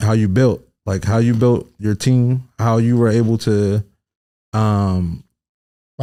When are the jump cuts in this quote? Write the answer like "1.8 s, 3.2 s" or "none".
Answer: none